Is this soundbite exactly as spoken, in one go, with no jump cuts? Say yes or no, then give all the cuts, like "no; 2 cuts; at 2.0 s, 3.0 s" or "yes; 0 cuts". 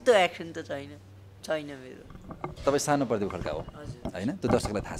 yes; 0 cuts